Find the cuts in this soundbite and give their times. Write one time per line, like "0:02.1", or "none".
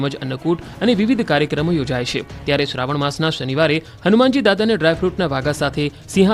0:02.3

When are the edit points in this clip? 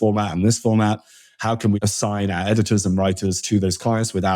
0:01.8

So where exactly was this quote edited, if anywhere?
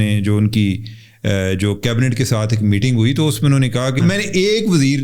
0:04.0

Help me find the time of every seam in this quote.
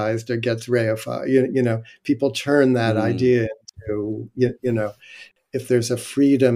0:05.2

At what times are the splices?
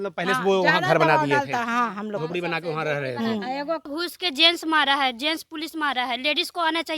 0:03.9

